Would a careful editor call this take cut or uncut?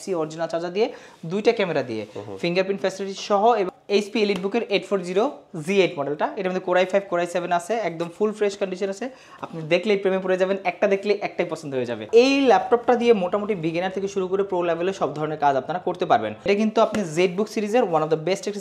cut